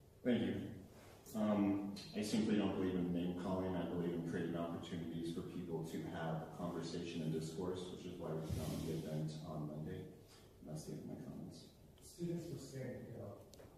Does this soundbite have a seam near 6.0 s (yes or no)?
no